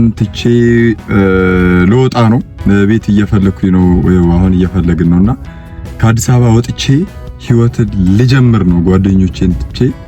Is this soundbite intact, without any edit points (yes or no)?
yes